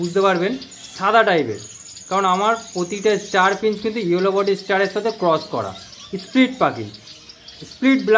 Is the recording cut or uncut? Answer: uncut